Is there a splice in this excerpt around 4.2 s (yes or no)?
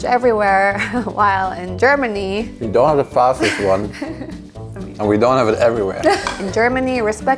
no